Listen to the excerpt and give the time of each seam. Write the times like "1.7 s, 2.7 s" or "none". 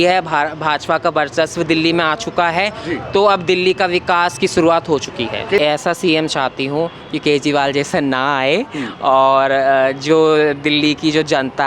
5.6 s